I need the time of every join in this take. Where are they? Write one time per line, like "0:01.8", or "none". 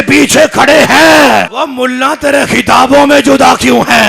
0:01.5